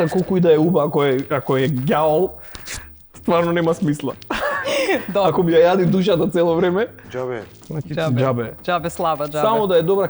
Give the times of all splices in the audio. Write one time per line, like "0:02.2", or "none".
none